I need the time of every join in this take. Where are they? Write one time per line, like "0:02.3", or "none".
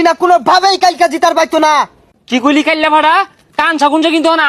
0:02.0